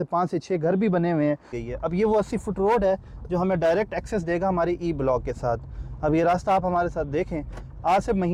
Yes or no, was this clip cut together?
yes